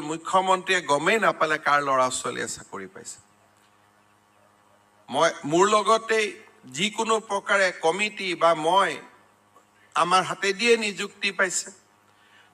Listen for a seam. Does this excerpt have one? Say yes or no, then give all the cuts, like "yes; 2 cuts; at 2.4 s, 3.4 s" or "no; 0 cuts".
yes; 1 cut; at 3.5 s